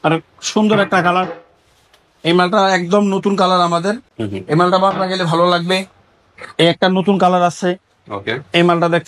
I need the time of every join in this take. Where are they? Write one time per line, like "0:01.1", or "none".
none